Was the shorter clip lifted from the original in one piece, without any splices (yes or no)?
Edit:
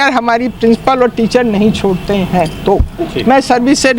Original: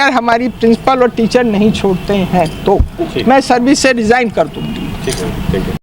yes